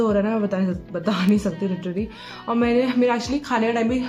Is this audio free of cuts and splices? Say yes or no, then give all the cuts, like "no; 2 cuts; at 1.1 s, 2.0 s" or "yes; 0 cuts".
yes; 0 cuts